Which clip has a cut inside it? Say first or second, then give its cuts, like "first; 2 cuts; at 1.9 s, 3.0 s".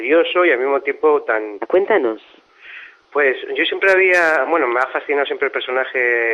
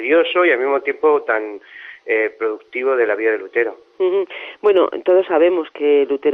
second; 1 cut; at 1.7 s